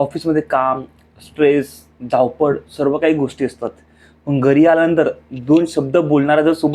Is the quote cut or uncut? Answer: uncut